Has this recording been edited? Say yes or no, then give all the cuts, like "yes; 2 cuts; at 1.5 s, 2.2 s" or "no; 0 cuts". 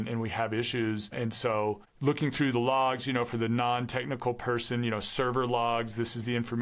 yes; 1 cut; at 1.9 s